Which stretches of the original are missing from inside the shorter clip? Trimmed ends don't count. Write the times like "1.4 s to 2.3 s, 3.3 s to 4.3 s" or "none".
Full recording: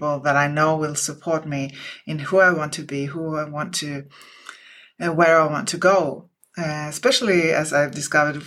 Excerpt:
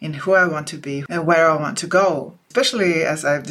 3.1 s to 4.9 s, 6.3 s to 6.9 s